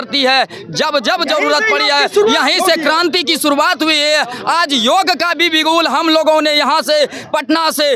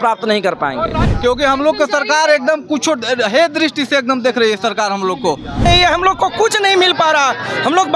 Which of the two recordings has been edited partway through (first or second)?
second